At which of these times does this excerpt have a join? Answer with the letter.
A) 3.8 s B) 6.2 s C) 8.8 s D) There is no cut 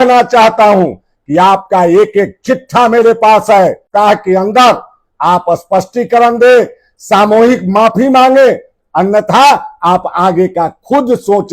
A